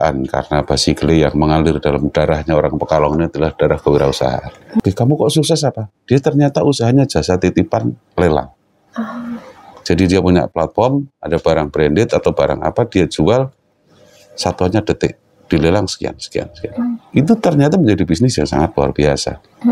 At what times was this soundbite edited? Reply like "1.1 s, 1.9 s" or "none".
4.8 s